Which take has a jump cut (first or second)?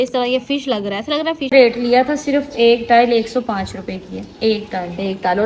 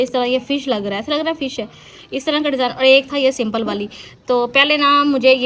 first